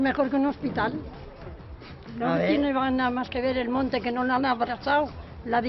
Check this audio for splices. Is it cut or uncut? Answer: uncut